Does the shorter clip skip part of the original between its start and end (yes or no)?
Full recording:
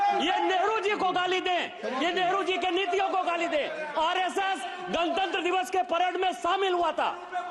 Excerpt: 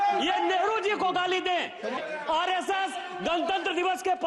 yes